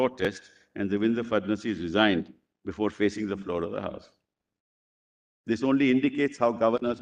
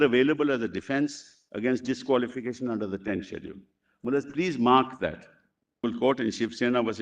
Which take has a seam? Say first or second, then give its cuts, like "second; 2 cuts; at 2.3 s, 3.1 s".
second; 1 cut; at 5.8 s